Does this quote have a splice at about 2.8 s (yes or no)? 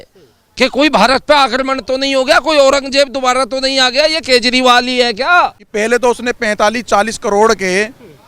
no